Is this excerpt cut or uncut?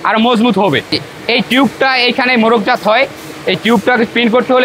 cut